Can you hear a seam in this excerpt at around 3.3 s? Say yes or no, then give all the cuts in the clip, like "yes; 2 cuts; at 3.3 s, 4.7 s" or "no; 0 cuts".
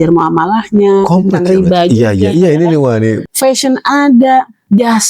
yes; 1 cut; at 3.3 s